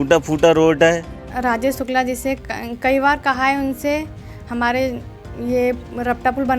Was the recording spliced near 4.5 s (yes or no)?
no